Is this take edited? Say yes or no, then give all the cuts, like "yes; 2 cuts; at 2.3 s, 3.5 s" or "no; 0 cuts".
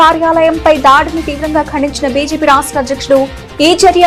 no; 0 cuts